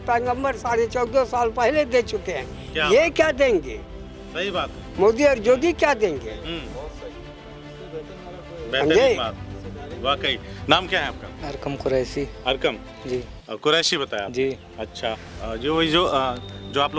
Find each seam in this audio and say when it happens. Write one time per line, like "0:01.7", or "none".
none